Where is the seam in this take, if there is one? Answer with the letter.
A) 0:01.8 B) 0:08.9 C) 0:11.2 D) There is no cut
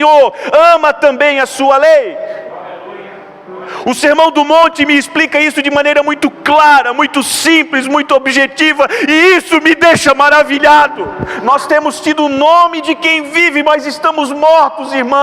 C